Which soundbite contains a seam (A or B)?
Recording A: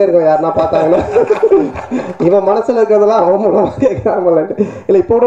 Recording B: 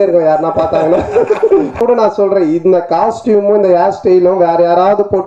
B